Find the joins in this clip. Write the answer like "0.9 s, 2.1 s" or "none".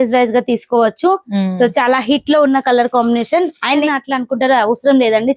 3.9 s